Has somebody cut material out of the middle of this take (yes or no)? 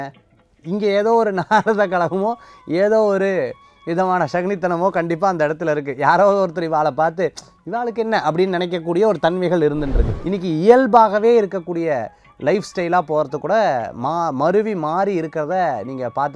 yes